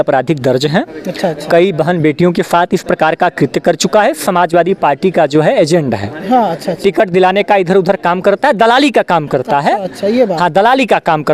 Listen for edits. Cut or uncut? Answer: uncut